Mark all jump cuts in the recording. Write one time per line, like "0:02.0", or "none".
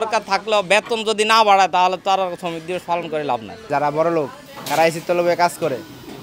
0:03.7